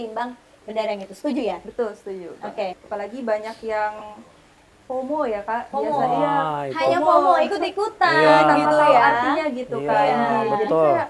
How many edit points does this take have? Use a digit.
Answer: 1